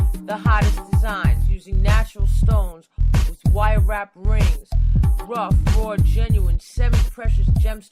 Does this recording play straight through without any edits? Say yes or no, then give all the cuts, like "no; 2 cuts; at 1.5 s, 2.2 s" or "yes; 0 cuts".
yes; 0 cuts